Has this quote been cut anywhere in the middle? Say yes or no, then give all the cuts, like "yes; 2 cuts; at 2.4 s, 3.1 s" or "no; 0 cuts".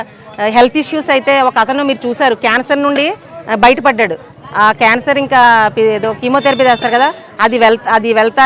no; 0 cuts